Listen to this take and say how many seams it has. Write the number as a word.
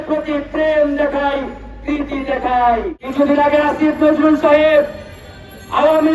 one